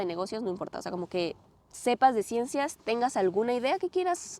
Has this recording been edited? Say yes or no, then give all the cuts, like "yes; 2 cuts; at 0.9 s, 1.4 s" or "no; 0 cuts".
no; 0 cuts